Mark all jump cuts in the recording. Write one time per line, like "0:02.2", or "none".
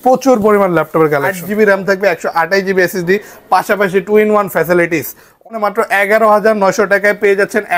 0:01.4
0:05.5